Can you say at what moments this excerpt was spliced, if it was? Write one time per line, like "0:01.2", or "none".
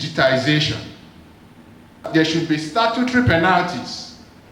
0:02.1